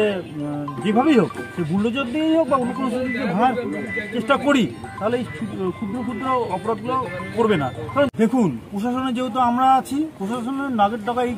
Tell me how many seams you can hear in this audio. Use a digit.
1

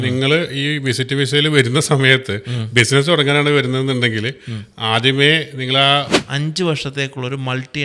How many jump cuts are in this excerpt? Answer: 1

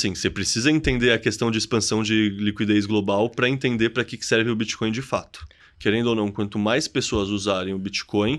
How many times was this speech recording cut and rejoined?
1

